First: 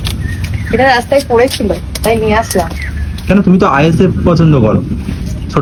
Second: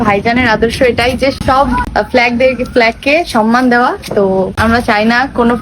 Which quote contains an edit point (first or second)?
second